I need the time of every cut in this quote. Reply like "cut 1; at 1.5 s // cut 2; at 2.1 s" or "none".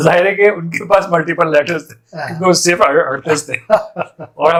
none